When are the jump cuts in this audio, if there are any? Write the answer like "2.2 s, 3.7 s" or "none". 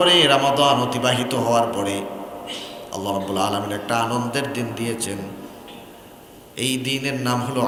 none